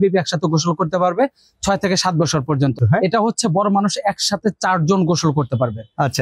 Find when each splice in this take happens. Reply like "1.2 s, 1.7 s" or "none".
2.8 s